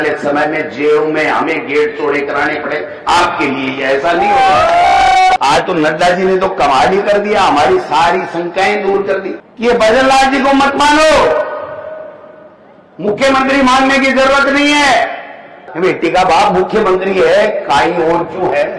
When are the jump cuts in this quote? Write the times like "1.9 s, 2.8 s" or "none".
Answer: 5.4 s, 9.4 s, 15.7 s